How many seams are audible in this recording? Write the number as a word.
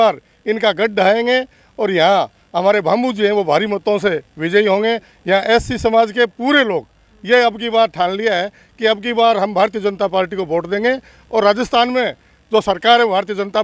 zero